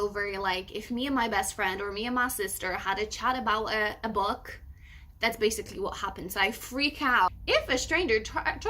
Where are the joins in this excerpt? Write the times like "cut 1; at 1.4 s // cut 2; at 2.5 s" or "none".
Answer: cut 1; at 7.3 s